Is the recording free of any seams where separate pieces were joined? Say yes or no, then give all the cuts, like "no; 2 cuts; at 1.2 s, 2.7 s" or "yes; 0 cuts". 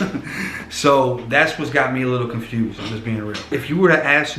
no; 1 cut; at 3.4 s